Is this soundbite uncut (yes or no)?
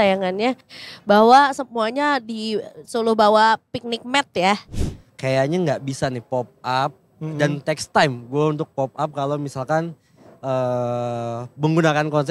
no